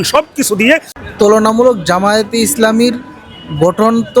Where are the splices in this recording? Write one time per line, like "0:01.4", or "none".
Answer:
0:00.9